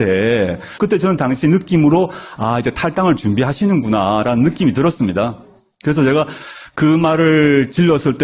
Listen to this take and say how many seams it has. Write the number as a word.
one